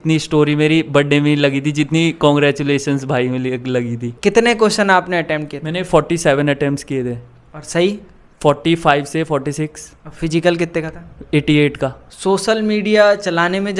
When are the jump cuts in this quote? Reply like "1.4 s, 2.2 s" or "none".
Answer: 4.1 s, 12.1 s